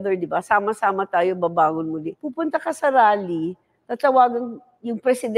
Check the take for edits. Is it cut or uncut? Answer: cut